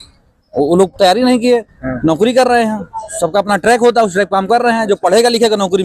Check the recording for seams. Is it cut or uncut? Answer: uncut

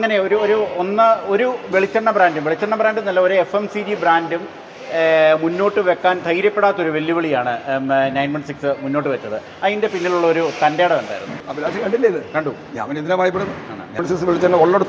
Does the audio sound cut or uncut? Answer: cut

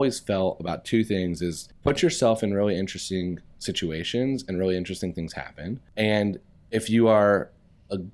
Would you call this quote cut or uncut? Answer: cut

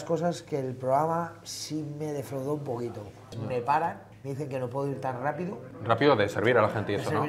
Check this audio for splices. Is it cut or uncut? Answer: cut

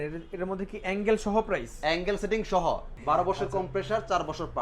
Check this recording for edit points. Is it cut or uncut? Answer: cut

